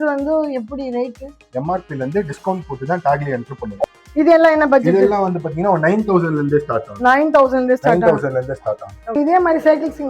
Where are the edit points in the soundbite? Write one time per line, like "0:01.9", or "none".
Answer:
0:03.8
0:09.1